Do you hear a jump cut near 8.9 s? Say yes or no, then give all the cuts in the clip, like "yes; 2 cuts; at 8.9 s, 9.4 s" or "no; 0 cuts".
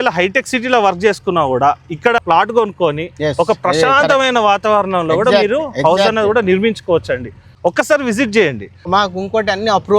yes; 2 cuts; at 2.2 s, 8.9 s